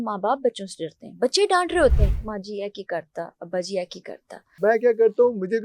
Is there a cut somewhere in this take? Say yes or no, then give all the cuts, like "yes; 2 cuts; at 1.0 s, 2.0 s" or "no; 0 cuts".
yes; 1 cut; at 4.6 s